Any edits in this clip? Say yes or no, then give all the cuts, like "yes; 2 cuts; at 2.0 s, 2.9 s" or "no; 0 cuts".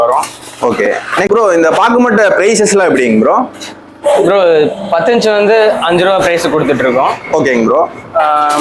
yes; 1 cut; at 1.3 s